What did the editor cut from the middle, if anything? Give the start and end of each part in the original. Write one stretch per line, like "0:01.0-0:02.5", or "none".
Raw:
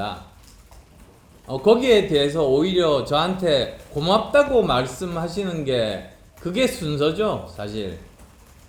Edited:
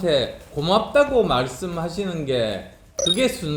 none